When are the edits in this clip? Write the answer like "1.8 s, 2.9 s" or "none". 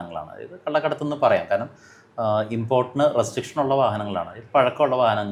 none